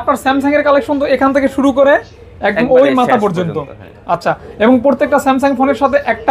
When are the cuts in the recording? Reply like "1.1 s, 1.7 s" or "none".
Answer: none